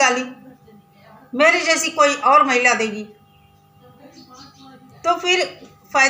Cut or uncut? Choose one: uncut